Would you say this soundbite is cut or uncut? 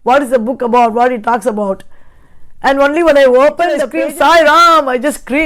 cut